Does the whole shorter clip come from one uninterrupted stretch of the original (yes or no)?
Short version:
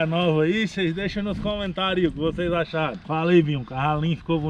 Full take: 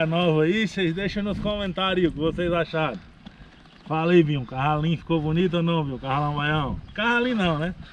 no